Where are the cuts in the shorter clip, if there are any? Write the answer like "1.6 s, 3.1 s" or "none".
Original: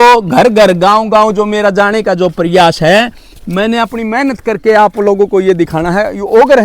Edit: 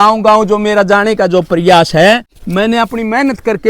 2.4 s